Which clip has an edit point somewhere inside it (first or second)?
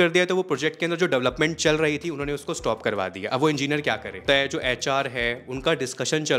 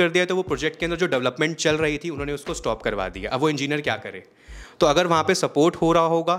first